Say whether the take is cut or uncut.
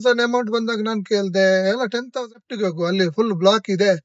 cut